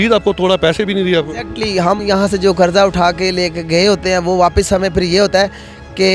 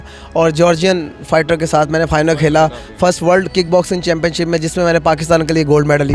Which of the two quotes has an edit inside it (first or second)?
first